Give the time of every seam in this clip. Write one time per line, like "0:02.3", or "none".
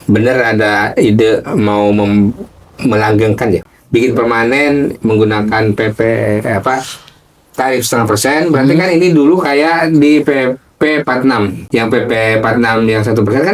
0:03.6
0:11.6